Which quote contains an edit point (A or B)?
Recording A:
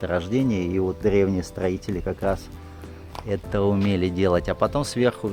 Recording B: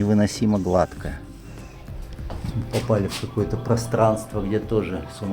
B